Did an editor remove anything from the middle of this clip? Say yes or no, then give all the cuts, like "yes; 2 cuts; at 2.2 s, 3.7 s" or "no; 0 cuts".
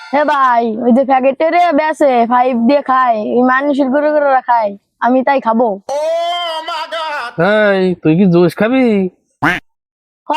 no; 0 cuts